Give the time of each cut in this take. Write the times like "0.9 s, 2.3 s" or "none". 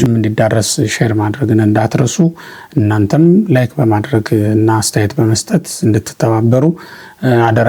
none